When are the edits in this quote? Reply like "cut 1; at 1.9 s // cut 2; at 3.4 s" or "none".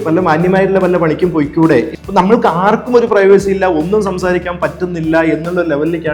cut 1; at 1.9 s